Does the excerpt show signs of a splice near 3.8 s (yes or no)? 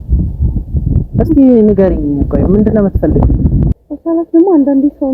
yes